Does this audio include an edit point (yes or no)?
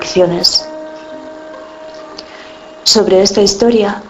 no